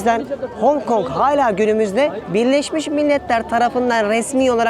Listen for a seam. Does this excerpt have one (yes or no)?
yes